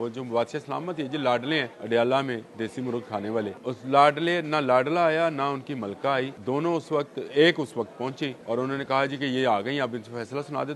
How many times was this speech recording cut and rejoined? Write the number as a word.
four